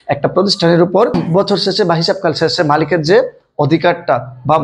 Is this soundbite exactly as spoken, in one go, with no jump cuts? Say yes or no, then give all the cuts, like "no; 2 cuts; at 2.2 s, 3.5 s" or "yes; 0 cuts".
no; 1 cut; at 1.2 s